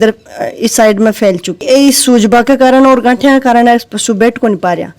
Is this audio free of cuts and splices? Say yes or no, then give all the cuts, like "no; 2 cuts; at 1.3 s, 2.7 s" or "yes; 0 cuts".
no; 1 cut; at 1.6 s